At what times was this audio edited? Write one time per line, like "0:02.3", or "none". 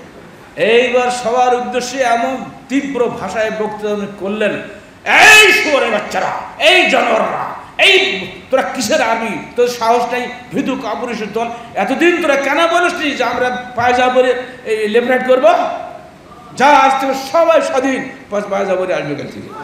none